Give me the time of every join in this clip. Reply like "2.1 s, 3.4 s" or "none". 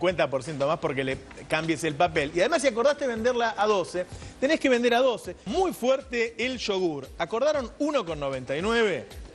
none

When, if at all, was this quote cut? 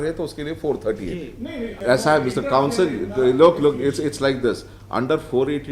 1.7 s

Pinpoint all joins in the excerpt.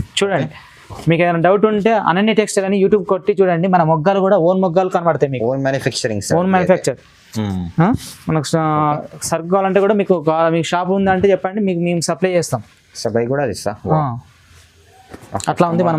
none

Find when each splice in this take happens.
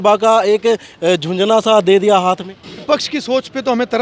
2.8 s

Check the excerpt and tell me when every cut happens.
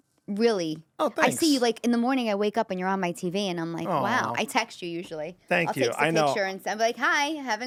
none

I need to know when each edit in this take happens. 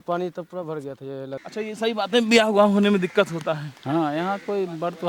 1.3 s

